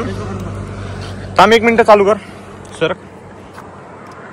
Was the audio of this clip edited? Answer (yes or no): no